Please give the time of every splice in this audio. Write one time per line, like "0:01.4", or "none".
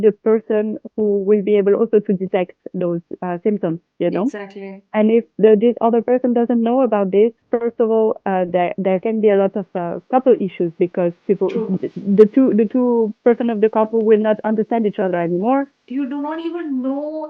0:15.8

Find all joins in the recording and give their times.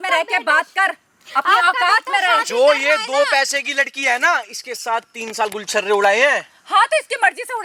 none

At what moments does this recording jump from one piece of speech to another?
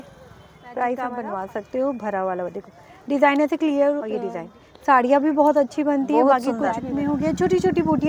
0:01.1
0:04.1
0:06.8

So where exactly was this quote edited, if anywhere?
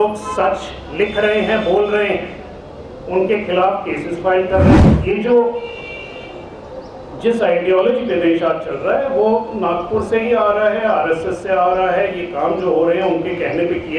0:05.0

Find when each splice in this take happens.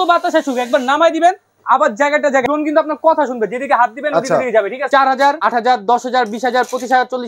0:02.4
0:04.8
0:05.4

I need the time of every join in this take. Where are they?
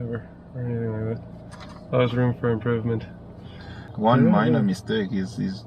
0:03.9

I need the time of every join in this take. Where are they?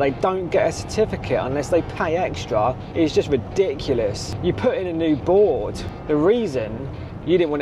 0:02.8
0:04.3
0:05.8

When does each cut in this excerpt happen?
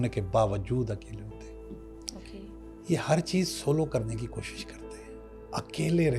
none

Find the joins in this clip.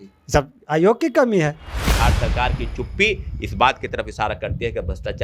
0:01.8

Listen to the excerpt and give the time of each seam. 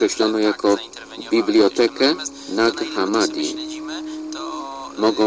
none

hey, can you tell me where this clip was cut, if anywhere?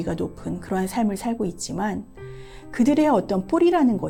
none

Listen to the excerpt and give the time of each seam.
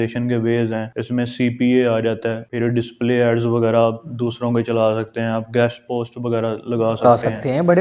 0:00.9
0:02.4

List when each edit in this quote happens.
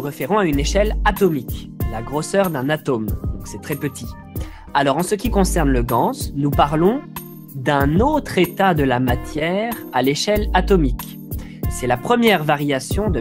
0:11.0

